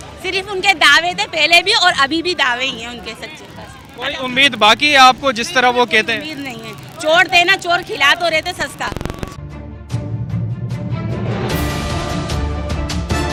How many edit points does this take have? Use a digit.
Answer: 0